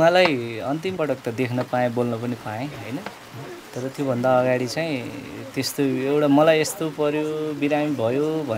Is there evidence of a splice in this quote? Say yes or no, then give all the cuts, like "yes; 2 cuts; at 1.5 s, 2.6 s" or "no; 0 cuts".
yes; 1 cut; at 0.9 s